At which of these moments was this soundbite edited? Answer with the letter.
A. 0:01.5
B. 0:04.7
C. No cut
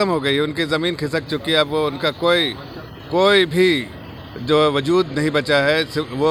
C